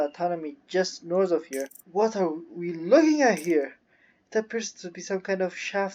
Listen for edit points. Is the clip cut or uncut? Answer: cut